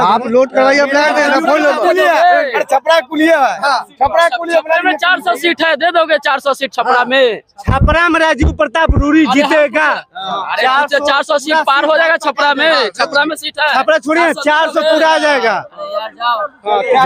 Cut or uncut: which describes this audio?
uncut